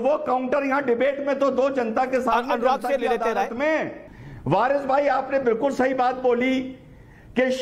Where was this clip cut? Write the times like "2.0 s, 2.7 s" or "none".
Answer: 4.1 s

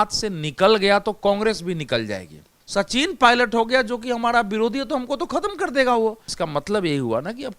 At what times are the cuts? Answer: 2.5 s, 6.3 s

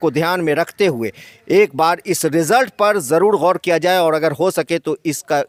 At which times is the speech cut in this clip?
none

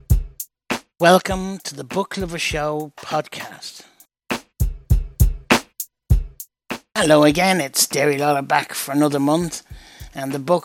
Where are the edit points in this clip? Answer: 6.6 s

